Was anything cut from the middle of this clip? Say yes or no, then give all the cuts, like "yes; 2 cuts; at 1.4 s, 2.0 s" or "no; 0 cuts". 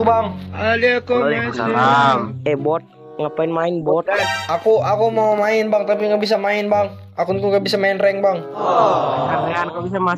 yes; 1 cut; at 2.3 s